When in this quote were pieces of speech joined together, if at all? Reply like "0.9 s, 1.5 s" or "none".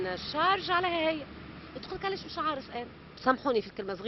3.0 s